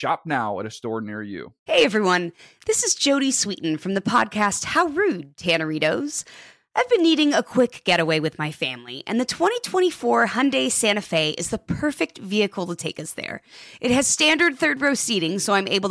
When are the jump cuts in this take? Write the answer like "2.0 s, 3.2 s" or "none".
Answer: 1.5 s